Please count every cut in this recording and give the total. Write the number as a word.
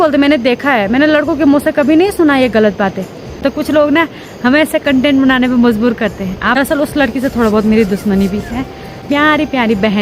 three